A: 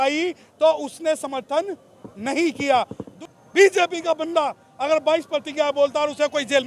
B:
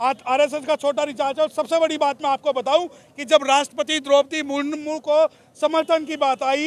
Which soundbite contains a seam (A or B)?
A